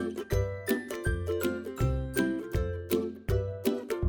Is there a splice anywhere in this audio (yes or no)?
no